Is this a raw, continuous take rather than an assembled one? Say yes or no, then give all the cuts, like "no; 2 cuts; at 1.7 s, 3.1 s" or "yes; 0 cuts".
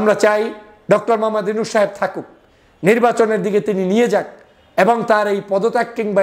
yes; 0 cuts